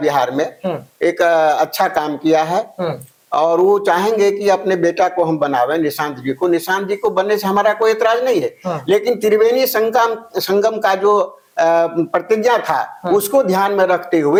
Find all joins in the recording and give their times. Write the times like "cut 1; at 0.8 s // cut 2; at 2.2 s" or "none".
none